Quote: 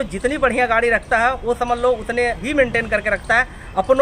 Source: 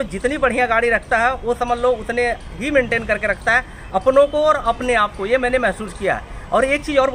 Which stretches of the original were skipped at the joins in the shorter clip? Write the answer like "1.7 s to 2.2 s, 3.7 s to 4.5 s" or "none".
2.4 s to 2.6 s